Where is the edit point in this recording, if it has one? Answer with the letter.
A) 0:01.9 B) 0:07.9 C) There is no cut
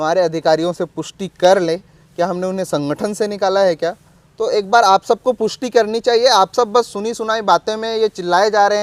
C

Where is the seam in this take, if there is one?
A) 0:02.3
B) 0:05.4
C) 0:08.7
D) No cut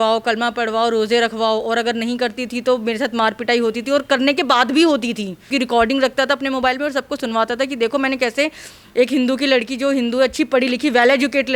B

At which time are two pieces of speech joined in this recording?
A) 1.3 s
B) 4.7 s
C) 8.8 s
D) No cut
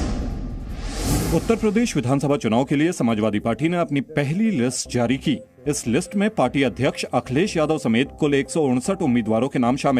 A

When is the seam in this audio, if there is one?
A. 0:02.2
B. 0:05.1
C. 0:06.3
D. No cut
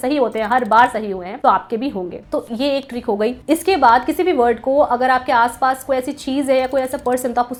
D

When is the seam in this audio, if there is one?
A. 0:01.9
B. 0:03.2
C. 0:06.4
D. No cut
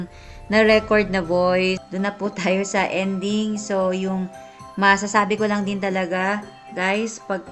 A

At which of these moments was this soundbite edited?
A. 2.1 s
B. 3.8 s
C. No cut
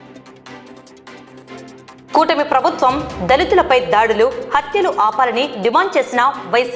A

